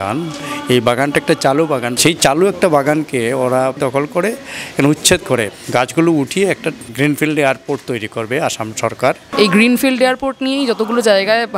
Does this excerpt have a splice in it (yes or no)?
yes